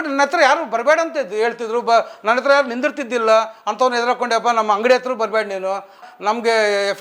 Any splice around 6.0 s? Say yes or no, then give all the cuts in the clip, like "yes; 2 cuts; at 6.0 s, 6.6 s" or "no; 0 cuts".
yes; 1 cut; at 6.0 s